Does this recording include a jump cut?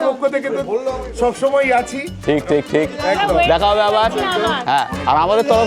no; 0 cuts

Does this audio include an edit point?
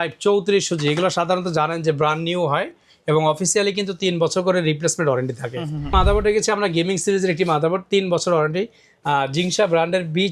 yes; 1 cut; at 5.9 s

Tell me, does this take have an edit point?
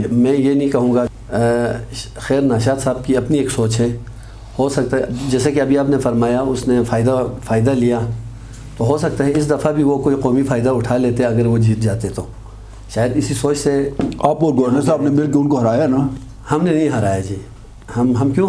yes; 1 cut; at 1.1 s

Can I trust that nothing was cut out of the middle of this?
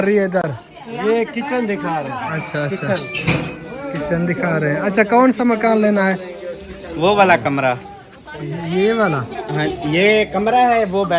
yes; 0 cuts

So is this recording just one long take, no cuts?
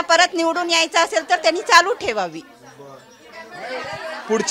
yes; 0 cuts

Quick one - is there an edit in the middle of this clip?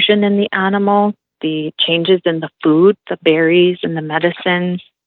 yes; 1 cut; at 1.3 s

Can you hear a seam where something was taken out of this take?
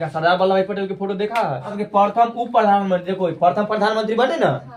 yes; 1 cut; at 1.8 s

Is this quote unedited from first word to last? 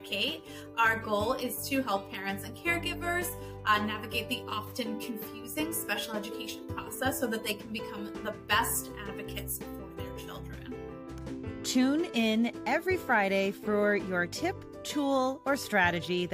yes; 0 cuts

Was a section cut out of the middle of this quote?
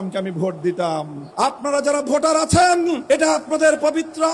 yes; 2 cuts; at 1.2 s, 3.0 s

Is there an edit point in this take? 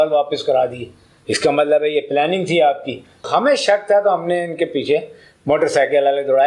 yes; 1 cut; at 3.3 s

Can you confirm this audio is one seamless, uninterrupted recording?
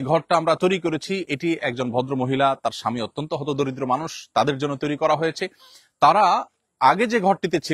yes; 0 cuts

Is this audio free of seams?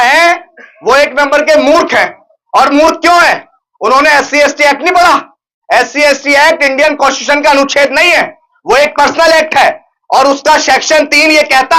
yes; 0 cuts

